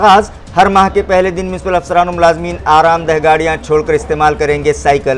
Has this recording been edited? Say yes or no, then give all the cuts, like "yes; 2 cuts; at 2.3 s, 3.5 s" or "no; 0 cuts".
no; 0 cuts